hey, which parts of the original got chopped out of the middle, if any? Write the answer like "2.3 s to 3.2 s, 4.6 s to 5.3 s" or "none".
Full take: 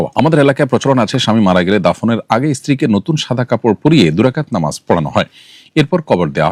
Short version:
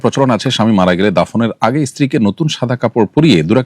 none